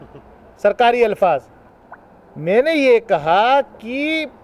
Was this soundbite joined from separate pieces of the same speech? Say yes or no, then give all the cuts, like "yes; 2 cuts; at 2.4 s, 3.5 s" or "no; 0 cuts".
no; 0 cuts